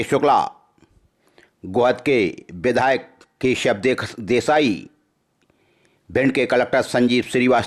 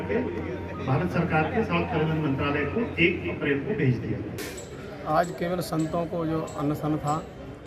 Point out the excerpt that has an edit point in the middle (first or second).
second